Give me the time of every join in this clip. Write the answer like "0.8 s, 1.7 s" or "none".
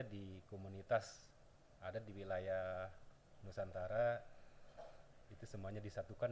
none

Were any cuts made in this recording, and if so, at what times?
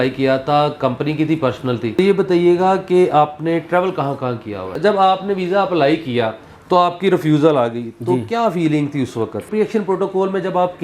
2.0 s, 4.8 s, 9.5 s

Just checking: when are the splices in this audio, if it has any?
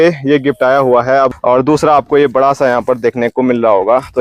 1.3 s

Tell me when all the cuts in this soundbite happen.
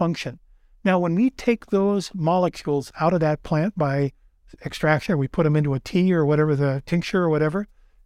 none

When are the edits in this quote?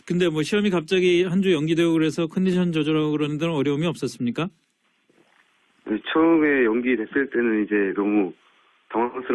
3.2 s

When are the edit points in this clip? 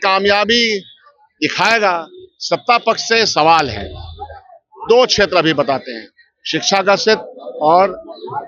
none

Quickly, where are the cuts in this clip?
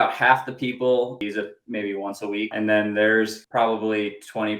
1.2 s, 2.5 s, 3.4 s

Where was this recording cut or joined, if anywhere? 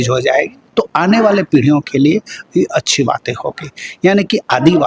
none

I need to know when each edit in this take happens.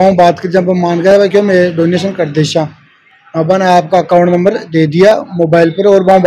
none

